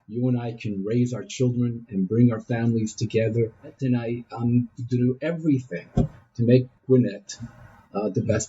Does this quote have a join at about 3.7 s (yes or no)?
yes